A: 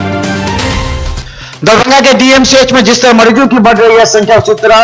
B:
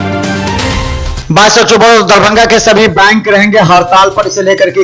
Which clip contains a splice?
A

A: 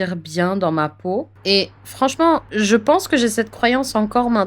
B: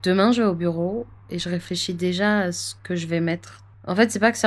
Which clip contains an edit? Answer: A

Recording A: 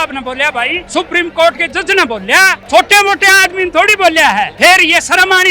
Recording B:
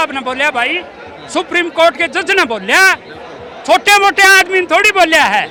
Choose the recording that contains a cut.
A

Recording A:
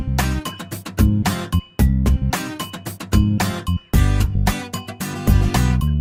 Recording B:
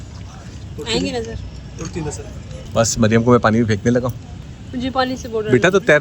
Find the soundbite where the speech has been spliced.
B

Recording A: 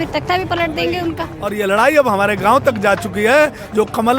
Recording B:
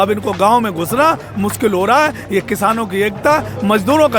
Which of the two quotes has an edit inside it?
A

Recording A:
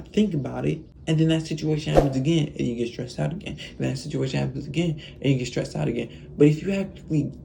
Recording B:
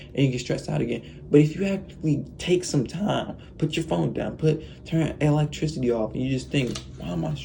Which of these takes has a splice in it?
A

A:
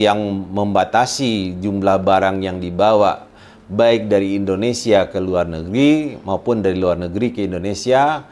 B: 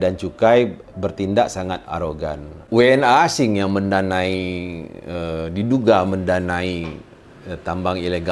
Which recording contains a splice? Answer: B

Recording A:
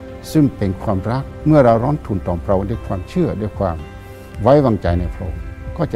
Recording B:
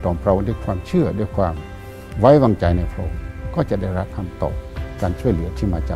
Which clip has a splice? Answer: A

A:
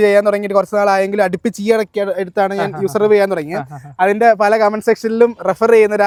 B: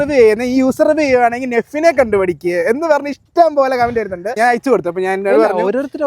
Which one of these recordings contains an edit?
B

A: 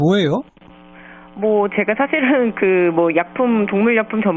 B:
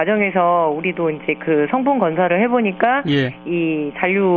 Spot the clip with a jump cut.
B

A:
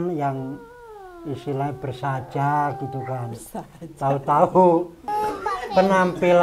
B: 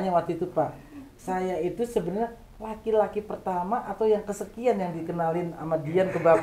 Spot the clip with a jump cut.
A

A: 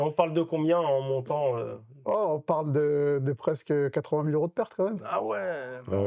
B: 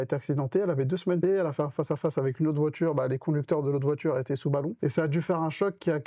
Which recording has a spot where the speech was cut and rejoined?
B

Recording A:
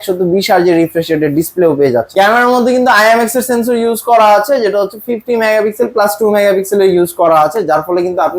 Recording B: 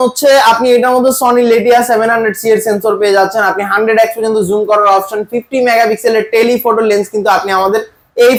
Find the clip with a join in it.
A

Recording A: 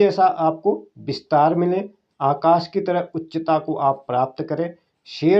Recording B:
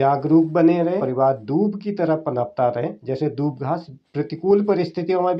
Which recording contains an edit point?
B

